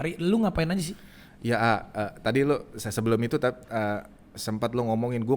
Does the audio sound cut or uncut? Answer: uncut